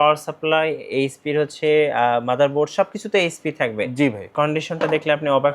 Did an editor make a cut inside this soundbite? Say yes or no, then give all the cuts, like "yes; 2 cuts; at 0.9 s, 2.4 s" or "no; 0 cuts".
yes; 1 cut; at 4.3 s